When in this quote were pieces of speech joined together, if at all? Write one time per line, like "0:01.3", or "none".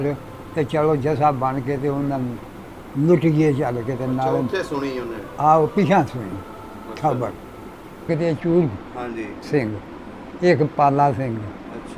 0:08.0